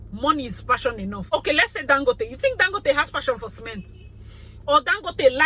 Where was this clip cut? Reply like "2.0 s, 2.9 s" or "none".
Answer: 1.3 s